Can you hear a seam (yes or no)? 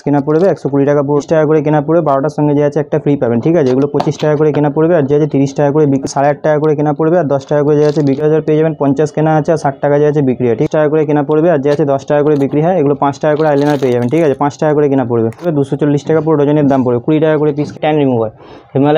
yes